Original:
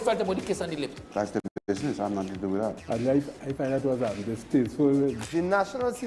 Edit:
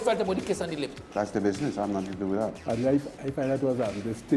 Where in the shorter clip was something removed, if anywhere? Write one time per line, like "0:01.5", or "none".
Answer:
0:01.4